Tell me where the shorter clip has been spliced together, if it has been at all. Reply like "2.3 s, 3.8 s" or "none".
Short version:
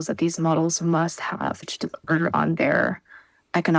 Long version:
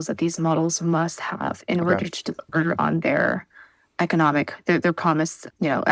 1.6 s